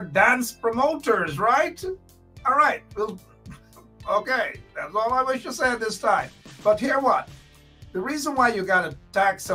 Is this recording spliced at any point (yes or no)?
no